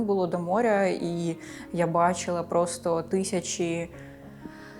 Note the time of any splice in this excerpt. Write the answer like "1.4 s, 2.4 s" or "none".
none